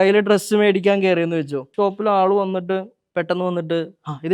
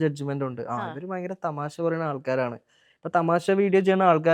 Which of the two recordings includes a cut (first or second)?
first